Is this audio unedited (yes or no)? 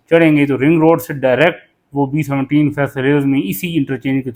yes